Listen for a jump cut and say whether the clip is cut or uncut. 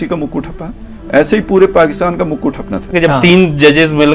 cut